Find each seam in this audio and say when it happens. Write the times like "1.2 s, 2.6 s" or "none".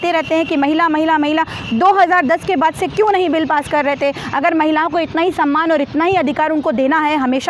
none